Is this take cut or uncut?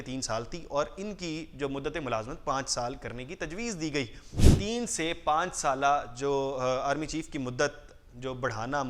cut